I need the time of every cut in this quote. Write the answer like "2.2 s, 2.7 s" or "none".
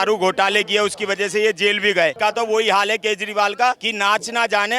2.1 s, 3.9 s